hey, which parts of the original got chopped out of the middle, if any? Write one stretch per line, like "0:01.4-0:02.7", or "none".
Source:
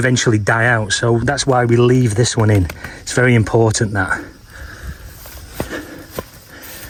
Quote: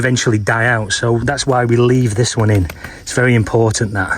none